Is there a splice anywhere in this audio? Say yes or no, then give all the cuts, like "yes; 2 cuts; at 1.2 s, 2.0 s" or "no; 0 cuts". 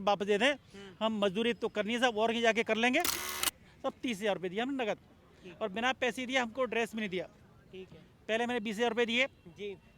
yes; 1 cut; at 3.8 s